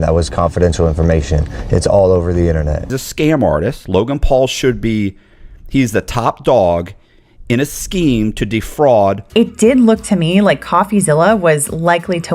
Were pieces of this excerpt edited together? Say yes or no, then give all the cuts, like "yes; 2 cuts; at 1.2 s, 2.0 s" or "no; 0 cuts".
yes; 2 cuts; at 2.9 s, 9.2 s